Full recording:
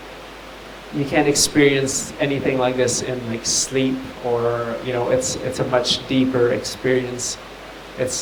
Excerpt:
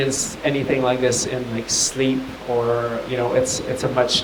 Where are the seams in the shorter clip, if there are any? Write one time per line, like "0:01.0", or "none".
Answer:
none